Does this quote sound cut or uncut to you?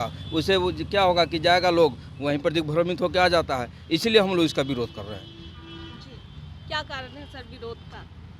uncut